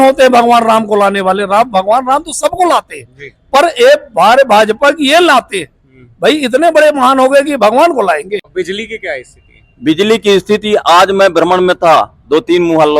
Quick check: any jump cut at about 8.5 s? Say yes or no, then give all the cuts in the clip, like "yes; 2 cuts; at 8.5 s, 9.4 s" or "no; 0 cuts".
yes; 1 cut; at 8.5 s